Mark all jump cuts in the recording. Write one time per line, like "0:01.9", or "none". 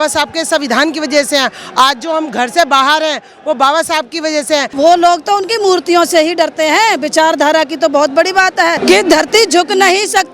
0:04.7
0:08.8